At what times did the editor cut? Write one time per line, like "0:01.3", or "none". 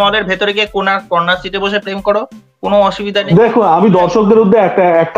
0:03.3